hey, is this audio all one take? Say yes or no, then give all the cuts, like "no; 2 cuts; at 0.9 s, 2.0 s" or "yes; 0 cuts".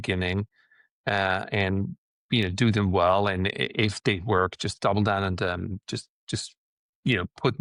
yes; 0 cuts